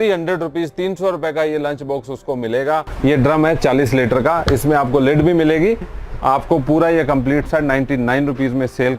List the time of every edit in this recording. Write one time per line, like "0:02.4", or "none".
0:02.9